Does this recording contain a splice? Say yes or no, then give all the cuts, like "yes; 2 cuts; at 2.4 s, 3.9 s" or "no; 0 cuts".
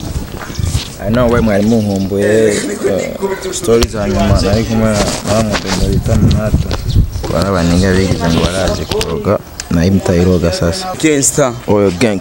yes; 2 cuts; at 7.2 s, 11.0 s